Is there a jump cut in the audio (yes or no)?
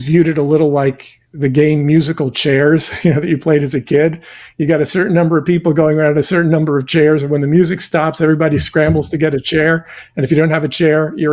no